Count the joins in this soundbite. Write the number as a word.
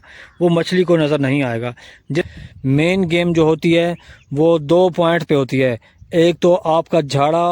one